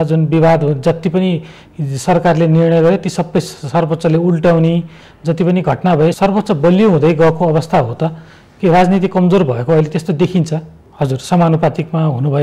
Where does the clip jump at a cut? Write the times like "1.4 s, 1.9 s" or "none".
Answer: 6.2 s, 10.8 s